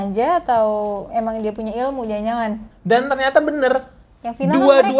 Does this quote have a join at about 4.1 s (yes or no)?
no